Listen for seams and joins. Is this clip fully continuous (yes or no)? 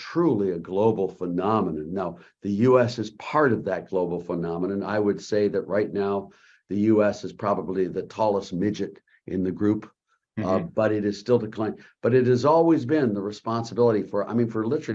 yes